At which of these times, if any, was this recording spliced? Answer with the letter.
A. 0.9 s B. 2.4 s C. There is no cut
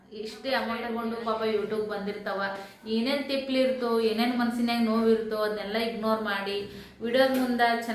A